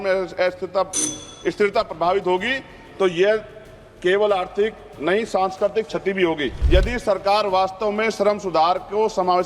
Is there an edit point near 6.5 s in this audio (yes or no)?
yes